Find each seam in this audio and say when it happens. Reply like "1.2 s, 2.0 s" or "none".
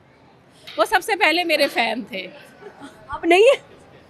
none